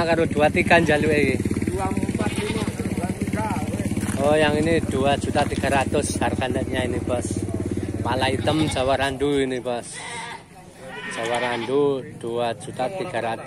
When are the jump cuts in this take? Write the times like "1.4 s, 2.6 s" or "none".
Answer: none